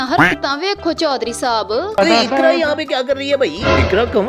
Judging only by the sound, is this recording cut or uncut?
cut